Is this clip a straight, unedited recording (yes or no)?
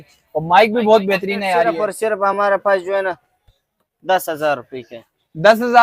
no